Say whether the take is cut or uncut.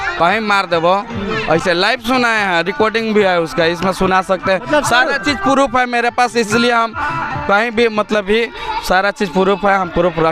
uncut